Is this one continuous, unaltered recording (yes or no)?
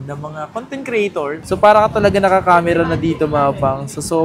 no